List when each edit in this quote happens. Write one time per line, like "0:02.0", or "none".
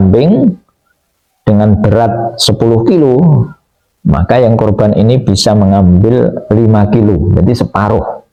none